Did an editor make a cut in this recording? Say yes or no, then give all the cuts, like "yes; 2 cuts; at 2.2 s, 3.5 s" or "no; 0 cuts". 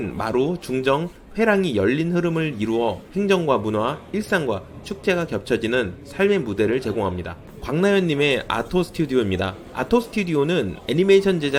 no; 0 cuts